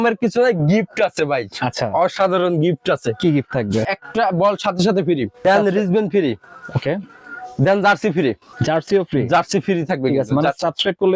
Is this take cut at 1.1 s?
no; 3 cuts; at 3.9 s, 5.4 s, 8.1 s

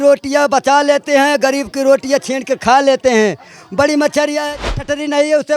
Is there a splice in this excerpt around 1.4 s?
no; 1 cut; at 4.6 s

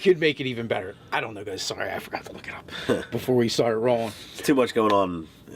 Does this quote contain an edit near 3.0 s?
no; 1 cut; at 1.4 s

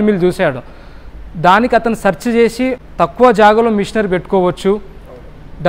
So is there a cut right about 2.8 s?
yes; 1 cut; at 2.8 s

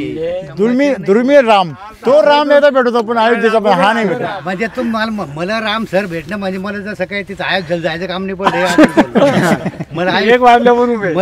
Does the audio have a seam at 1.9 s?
yes; 2 cuts; at 1.9 s, 4.4 s

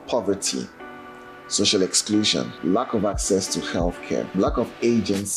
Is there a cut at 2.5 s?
yes; 2 cuts; at 2.5 s, 4.3 s

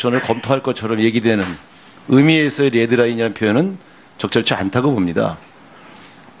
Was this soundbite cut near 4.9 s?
no; 0 cuts

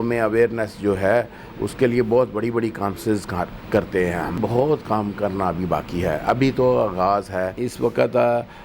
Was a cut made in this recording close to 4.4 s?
yes; 2 cuts; at 4.4 s, 7.6 s

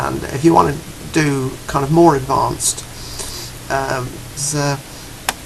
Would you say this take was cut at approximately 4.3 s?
no; 0 cuts

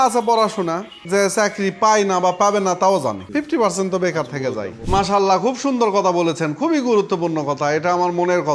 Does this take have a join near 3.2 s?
yes; 3 cuts; at 1.0 s, 3.2 s, 4.8 s

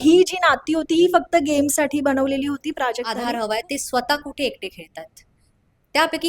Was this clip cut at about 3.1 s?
yes; 1 cut; at 3.1 s

